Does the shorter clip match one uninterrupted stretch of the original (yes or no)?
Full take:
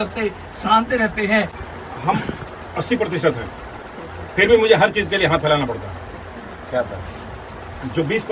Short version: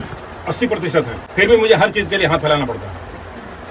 no